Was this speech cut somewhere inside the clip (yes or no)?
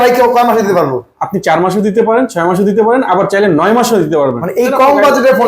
no